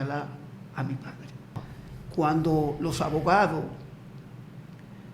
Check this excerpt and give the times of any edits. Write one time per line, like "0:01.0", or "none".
0:01.7

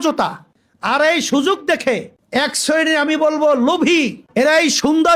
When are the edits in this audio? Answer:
none

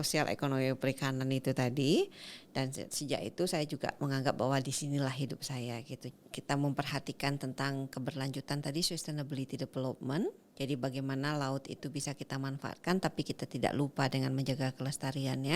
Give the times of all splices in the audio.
0:06.1
0:10.5

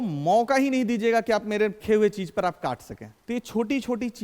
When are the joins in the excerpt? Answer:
none

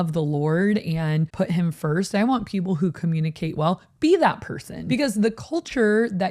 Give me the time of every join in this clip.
0:01.3
0:04.7

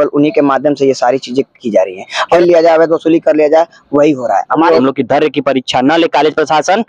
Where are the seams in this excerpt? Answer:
0:02.3
0:04.8

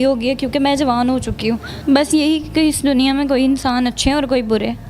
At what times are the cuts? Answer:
0:01.7

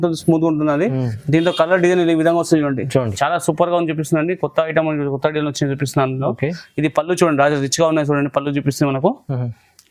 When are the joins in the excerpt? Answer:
0:03.1

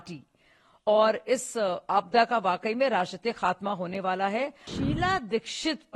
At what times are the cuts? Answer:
0:04.7

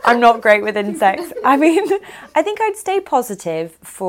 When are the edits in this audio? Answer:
none

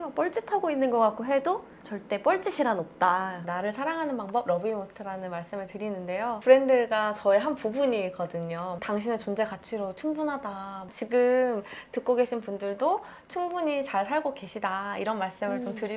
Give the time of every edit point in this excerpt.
0:03.4
0:10.8

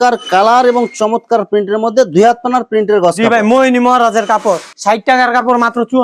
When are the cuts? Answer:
none

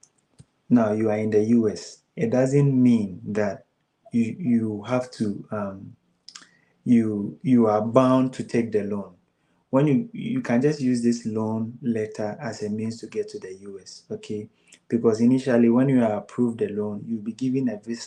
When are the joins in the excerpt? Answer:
none

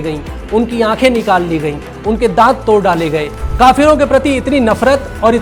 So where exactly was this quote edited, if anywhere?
0:03.4

